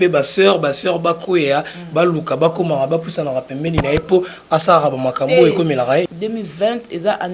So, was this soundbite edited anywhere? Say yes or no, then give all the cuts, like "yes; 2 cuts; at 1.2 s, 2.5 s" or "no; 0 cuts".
yes; 1 cut; at 6.1 s